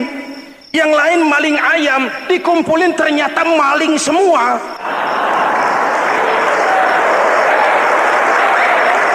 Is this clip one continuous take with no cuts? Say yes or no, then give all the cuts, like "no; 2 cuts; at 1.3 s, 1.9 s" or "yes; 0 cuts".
no; 1 cut; at 4.8 s